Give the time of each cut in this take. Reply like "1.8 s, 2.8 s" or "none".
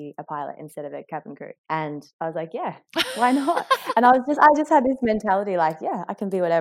none